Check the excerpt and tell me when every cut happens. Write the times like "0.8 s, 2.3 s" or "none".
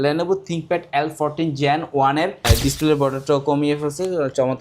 2.4 s